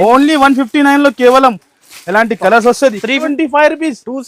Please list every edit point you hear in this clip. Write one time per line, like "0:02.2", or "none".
0:03.3